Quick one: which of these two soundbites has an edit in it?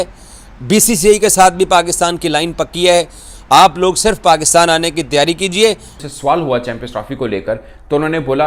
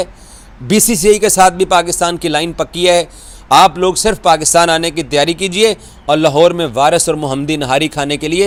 first; 1 cut; at 6.0 s

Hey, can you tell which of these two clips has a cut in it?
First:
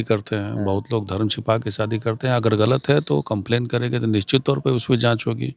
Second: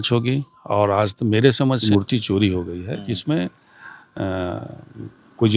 second; 1 cut; at 1.8 s

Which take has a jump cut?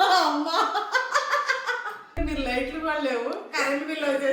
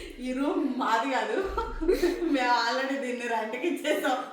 first; 1 cut; at 2.2 s

